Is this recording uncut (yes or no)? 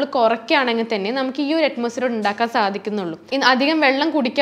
no